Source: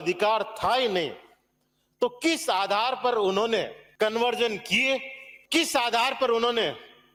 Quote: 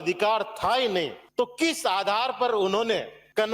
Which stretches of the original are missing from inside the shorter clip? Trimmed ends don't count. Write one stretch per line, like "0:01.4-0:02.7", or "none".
0:01.2-0:01.8